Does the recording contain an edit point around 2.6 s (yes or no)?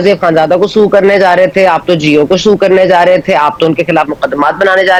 no